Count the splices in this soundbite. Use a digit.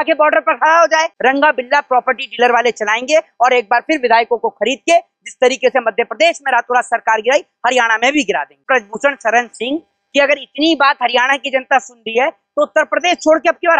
2